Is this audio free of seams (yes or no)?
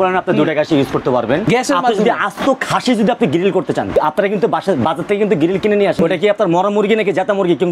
no